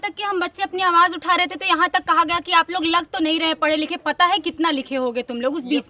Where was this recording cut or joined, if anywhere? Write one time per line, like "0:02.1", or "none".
none